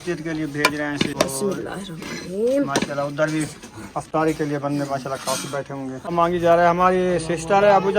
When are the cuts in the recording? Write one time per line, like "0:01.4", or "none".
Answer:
0:01.1
0:06.1